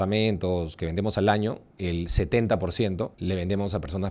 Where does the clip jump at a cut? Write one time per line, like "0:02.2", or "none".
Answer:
0:01.7
0:03.2